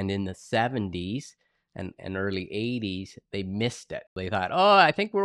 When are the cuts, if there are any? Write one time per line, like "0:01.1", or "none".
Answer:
0:04.2